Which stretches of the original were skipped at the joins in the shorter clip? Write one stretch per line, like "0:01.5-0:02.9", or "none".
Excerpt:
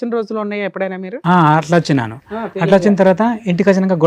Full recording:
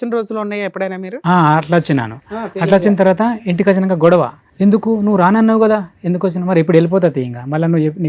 none